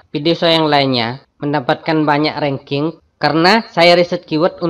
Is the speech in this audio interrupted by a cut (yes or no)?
yes